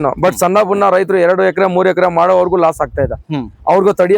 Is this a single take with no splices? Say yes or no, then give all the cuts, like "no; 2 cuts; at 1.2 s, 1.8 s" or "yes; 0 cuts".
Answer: yes; 0 cuts